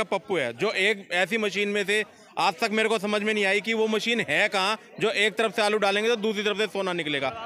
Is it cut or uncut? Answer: uncut